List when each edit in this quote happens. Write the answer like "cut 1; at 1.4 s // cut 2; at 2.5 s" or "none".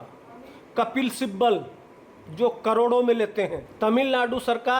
cut 1; at 3.6 s